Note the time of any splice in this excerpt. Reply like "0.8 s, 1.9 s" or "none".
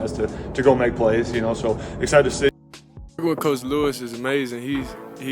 2.5 s